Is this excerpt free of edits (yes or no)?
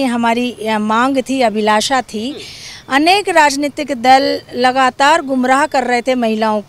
yes